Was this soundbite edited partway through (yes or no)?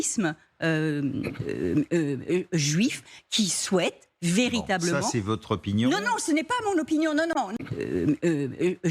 yes